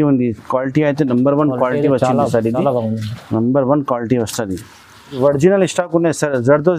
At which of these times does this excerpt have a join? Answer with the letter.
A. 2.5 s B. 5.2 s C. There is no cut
B